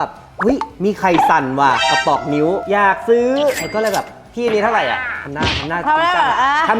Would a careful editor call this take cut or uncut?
uncut